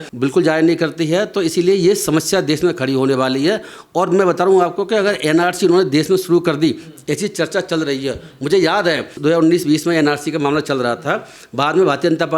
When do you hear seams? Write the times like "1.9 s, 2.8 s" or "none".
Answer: none